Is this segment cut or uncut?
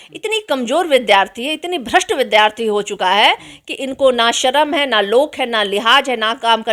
uncut